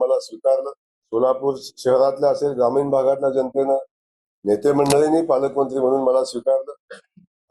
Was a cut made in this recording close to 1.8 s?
no; 0 cuts

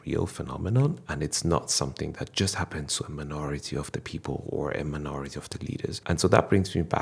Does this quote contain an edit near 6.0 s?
yes; 1 cut; at 6.0 s

